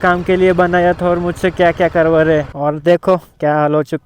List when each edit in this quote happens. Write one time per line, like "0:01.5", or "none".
0:02.5